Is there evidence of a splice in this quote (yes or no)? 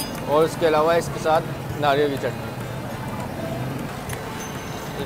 yes